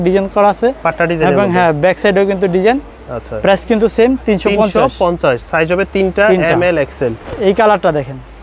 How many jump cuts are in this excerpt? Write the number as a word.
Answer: zero